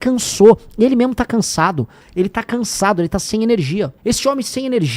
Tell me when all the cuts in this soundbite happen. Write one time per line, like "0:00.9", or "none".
0:02.0
0:03.9